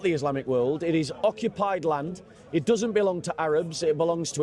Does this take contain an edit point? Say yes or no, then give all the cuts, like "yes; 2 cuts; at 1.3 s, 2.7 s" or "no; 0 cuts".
no; 0 cuts